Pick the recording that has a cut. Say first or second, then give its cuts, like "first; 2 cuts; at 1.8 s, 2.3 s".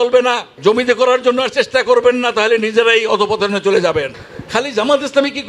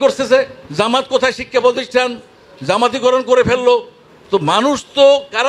first; 1 cut; at 4.2 s